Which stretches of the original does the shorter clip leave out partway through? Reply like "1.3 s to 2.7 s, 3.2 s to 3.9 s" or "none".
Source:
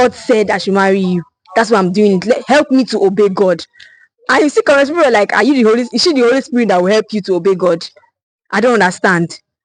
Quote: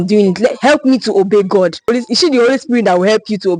3.8 s to 5.7 s